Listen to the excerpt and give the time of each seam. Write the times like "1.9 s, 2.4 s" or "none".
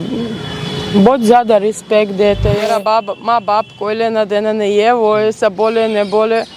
2.6 s